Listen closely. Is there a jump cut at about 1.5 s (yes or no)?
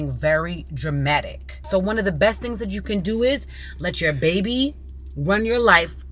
yes